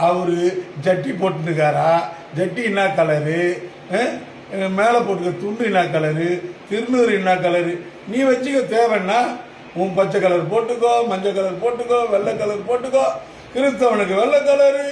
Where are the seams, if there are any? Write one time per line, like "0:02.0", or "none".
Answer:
none